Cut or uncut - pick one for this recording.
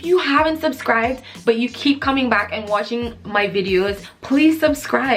cut